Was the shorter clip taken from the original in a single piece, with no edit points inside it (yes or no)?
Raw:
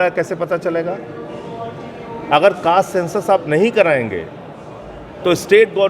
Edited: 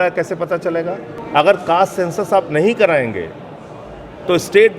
no